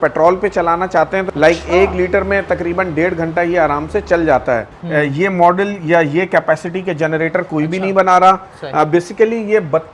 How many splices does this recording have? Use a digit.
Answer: 2